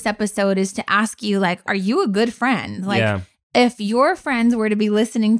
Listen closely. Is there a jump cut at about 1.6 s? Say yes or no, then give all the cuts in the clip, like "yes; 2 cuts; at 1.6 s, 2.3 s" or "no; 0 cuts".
yes; 1 cut; at 1.6 s